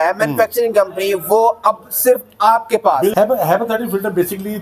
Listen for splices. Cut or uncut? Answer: cut